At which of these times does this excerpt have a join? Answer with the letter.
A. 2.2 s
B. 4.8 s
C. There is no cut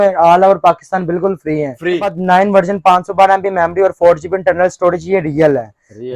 A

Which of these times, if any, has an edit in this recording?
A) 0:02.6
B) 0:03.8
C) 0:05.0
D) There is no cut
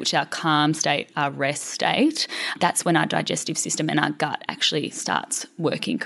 A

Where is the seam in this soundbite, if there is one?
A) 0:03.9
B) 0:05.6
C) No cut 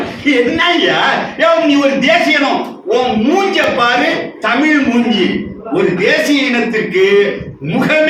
C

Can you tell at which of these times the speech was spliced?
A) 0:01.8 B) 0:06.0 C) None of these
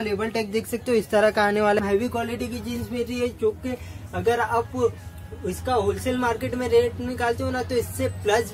A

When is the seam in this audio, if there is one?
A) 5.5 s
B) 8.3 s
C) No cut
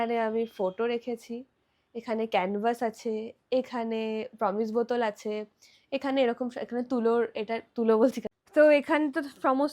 B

